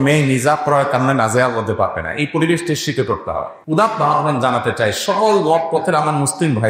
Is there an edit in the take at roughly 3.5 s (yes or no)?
yes